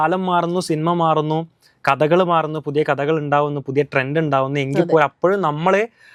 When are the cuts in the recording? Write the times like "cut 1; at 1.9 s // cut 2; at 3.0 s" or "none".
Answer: none